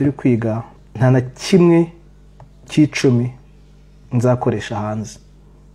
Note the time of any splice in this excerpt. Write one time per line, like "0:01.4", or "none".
none